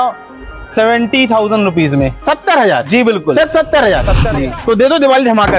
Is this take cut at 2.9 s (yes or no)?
no